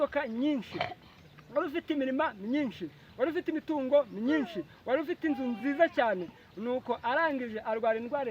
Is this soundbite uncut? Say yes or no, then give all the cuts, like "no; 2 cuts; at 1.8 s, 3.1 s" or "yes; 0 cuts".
yes; 0 cuts